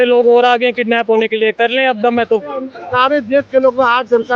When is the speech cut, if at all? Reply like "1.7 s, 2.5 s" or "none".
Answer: 2.8 s